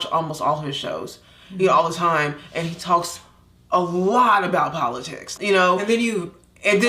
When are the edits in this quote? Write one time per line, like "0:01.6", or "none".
0:05.2